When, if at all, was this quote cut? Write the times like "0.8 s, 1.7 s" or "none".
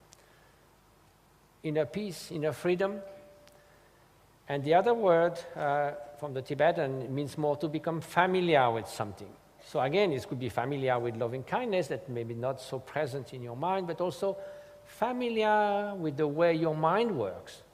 13.2 s